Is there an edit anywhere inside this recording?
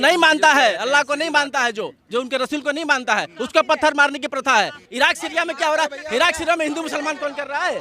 yes; 1 cut; at 4.8 s

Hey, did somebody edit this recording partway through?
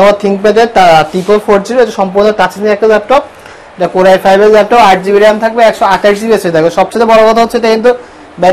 no; 0 cuts

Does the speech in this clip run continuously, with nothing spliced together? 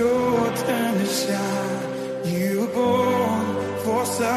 yes; 0 cuts

